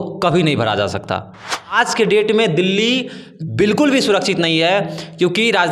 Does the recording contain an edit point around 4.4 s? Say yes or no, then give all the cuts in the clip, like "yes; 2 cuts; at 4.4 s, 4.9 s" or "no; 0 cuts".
no; 1 cut; at 1.7 s